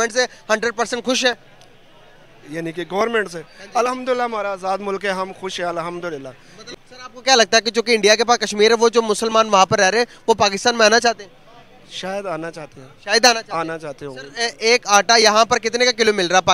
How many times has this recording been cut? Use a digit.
1